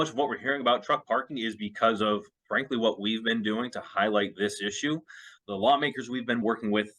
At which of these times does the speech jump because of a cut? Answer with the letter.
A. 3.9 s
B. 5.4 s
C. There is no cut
B